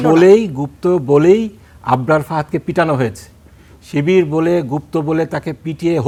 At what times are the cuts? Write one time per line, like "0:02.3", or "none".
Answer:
none